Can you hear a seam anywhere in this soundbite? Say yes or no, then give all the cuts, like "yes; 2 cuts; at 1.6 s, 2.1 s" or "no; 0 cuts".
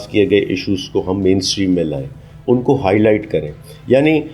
no; 0 cuts